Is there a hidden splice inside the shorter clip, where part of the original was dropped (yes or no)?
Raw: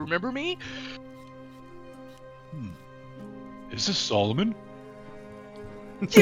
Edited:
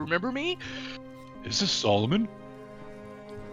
yes